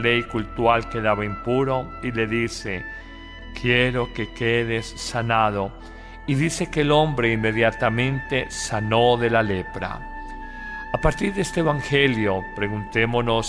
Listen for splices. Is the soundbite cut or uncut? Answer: cut